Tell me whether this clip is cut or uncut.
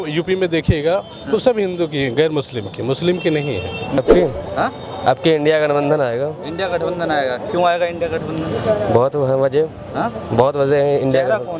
cut